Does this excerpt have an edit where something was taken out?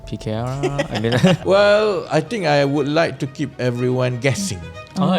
yes; 1 cut; at 1.4 s

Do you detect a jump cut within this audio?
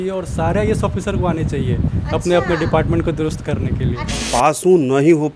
yes; 1 cut; at 4.3 s

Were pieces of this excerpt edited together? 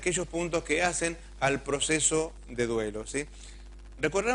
yes; 1 cut; at 3.3 s

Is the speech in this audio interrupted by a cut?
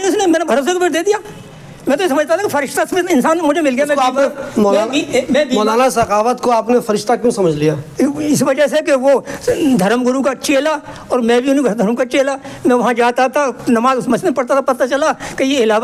no; 0 cuts

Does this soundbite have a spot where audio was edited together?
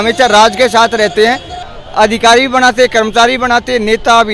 yes; 1 cut; at 1.5 s

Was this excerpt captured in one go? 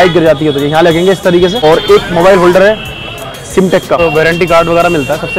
no; 2 cuts; at 1.6 s, 4.0 s

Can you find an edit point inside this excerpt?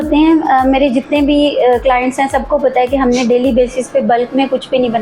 no; 0 cuts

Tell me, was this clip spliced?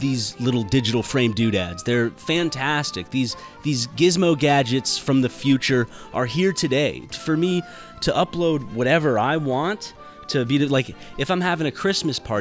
no; 0 cuts

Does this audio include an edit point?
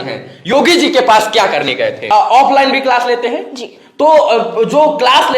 yes; 1 cut; at 2.1 s

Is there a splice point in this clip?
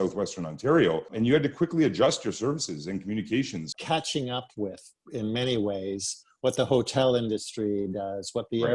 yes; 1 cut; at 3.7 s

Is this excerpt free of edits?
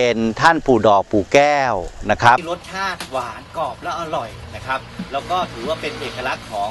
no; 1 cut; at 2.6 s

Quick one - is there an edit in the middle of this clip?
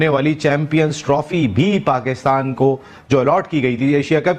no; 0 cuts

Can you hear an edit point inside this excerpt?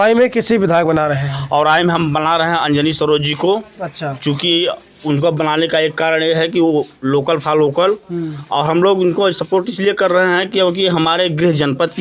no; 0 cuts

